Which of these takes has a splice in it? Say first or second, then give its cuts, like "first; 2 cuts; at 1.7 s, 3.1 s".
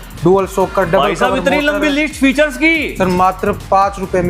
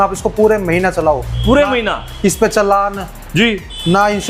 first; 1 cut; at 2.9 s